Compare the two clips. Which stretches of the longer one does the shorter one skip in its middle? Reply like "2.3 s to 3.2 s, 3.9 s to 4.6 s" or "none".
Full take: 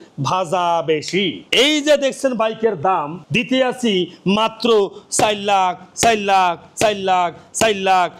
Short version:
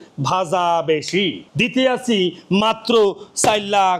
1.4 s to 3.2 s